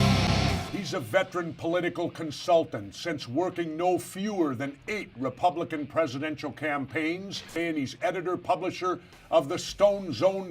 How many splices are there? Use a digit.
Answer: 1